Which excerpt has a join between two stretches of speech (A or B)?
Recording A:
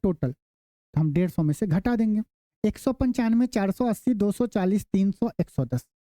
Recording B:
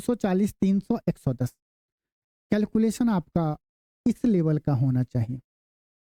A